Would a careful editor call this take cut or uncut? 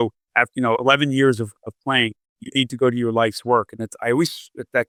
uncut